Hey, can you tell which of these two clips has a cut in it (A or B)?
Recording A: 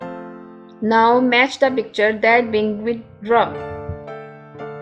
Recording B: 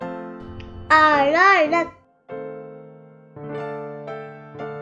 A